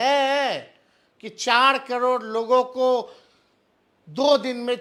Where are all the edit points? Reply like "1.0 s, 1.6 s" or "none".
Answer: none

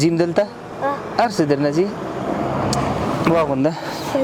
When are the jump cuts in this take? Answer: 3.2 s

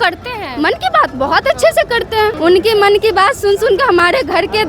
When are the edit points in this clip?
2.4 s

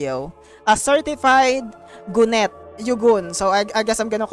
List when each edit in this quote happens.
2.6 s

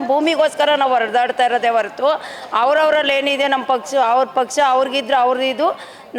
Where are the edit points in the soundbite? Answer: none

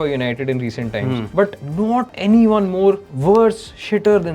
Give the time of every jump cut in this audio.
1.7 s, 3.1 s

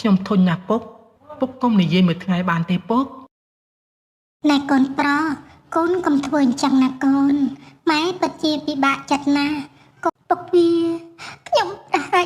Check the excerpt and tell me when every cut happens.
10.1 s

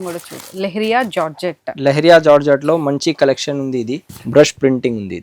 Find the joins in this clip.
4.1 s

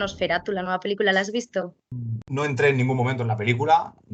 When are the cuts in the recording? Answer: 1.9 s

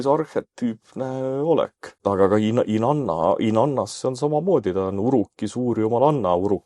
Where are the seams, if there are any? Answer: 2.0 s

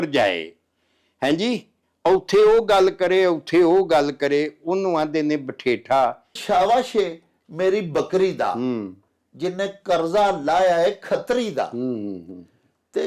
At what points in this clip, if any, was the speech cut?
6.4 s

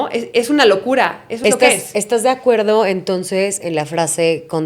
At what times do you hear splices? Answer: 1.4 s

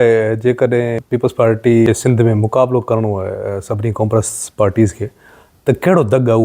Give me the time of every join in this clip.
1.0 s, 1.9 s

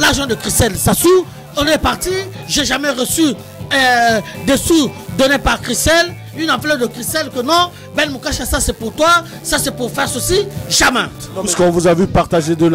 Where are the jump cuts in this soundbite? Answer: 1.4 s, 11.2 s

